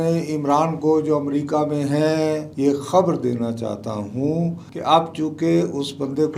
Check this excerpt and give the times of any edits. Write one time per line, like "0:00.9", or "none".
none